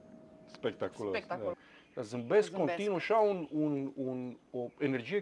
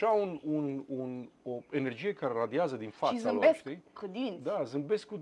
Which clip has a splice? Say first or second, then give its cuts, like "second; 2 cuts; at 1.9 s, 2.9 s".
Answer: first; 1 cut; at 1.6 s